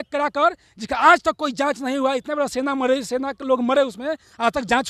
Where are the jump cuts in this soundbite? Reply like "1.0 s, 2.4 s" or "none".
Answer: none